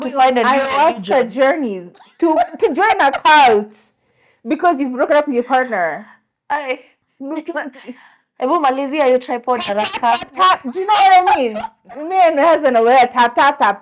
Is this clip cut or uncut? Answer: cut